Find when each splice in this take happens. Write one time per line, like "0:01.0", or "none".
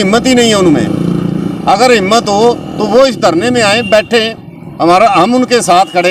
none